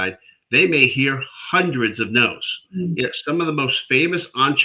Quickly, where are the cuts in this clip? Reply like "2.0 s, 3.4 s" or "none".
2.7 s